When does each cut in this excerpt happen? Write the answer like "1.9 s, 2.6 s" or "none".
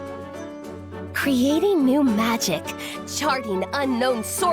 1.1 s